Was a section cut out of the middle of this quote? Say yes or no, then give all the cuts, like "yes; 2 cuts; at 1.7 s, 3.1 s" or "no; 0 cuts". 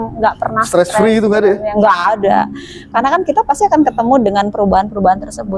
no; 0 cuts